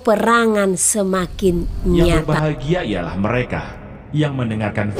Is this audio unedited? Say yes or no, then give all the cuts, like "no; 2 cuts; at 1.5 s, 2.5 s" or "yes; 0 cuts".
no; 1 cut; at 2.2 s